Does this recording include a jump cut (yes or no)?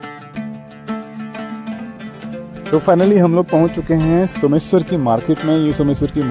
yes